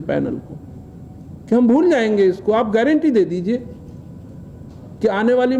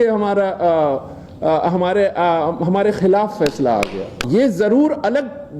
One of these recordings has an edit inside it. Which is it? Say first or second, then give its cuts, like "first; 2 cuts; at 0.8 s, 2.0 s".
second; 1 cut; at 4.2 s